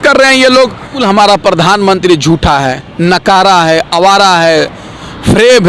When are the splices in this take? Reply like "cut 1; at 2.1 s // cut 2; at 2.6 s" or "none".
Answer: cut 1; at 1.0 s